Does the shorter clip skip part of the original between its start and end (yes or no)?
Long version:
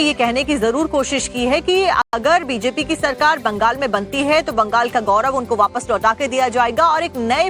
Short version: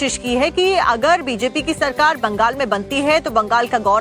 yes